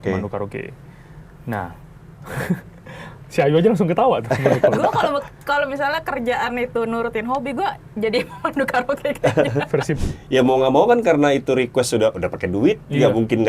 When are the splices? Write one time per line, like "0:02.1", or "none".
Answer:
0:10.0